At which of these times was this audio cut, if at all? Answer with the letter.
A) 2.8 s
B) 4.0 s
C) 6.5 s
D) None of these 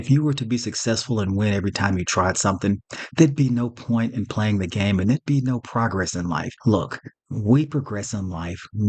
C